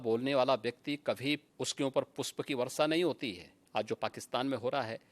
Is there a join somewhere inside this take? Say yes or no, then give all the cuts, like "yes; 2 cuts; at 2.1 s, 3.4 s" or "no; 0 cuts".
yes; 2 cuts; at 1.5 s, 3.5 s